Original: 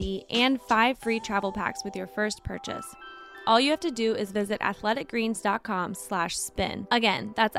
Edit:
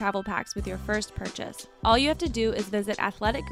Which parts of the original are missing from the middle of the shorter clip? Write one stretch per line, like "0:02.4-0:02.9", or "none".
0:02.9-0:03.3

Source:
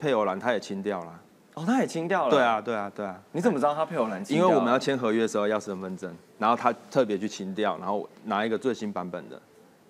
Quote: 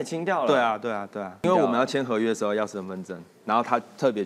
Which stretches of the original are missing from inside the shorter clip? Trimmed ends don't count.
0:03.3-0:04.4

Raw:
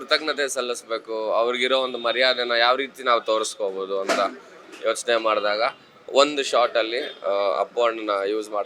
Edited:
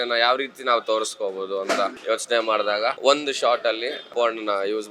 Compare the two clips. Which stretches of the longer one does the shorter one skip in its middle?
0:04.4-0:04.7
0:05.7-0:06.1
0:07.2-0:07.7

